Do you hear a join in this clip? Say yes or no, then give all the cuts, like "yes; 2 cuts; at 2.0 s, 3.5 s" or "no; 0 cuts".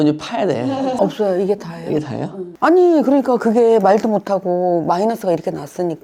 yes; 1 cut; at 0.9 s